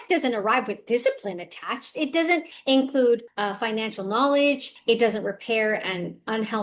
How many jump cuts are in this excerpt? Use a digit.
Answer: 0